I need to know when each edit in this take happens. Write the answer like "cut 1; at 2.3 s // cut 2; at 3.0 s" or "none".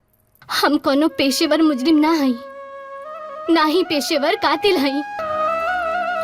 cut 1; at 5.2 s